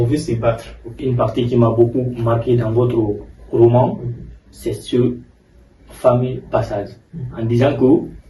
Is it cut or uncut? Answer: cut